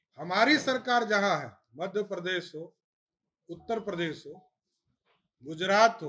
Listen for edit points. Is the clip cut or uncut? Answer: uncut